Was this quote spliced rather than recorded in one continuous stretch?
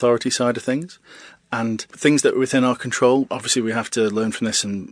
no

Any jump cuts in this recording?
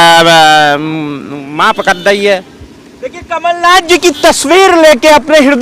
no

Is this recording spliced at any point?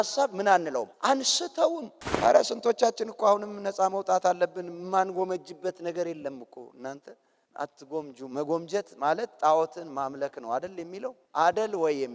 yes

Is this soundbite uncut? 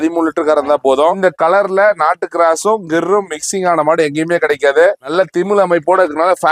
yes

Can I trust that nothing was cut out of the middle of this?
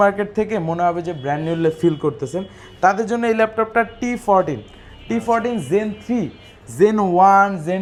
yes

